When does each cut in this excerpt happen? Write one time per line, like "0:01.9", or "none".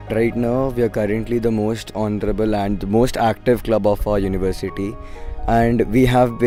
none